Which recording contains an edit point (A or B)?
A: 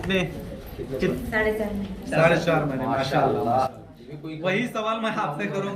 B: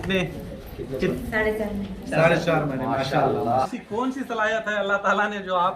B